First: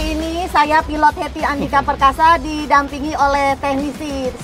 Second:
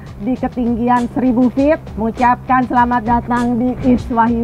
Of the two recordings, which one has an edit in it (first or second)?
second